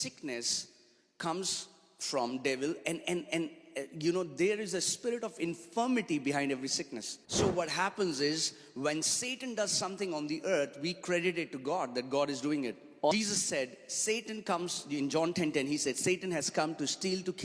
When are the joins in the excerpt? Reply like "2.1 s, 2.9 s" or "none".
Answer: 7.1 s, 13.1 s